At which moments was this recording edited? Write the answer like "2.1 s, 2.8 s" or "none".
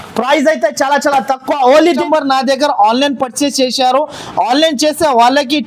1.9 s